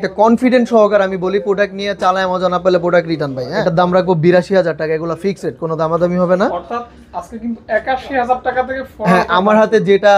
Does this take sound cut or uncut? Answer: cut